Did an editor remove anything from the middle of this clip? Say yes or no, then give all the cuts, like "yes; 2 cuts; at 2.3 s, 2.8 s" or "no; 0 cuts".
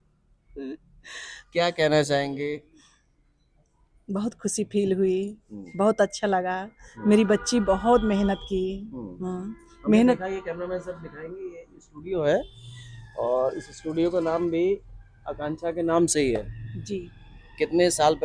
no; 0 cuts